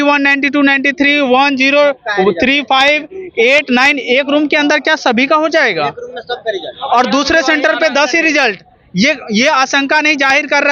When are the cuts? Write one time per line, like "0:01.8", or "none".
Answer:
none